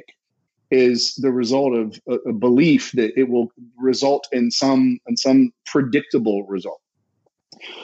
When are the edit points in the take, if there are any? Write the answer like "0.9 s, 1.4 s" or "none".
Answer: none

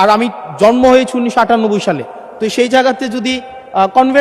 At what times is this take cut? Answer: none

